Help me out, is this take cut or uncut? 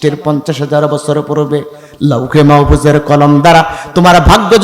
uncut